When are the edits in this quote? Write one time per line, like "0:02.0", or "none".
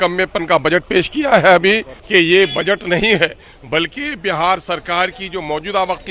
0:01.9